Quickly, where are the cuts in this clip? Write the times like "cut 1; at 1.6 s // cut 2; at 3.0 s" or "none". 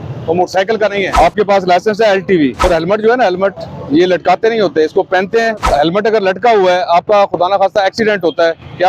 cut 1; at 1.1 s // cut 2; at 2.6 s // cut 3; at 5.6 s